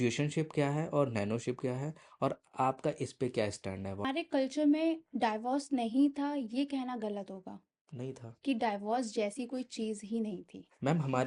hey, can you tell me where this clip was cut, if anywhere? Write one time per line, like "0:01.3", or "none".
0:04.1